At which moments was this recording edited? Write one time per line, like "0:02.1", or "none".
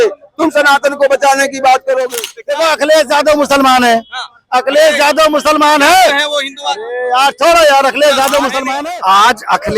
0:02.1
0:08.6